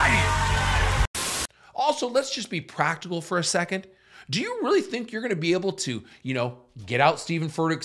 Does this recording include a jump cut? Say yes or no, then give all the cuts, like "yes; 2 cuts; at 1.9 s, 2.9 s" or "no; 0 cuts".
yes; 1 cut; at 1.1 s